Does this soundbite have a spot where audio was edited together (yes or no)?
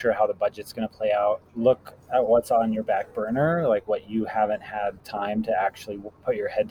yes